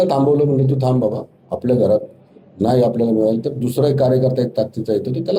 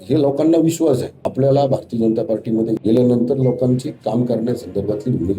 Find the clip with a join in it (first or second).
second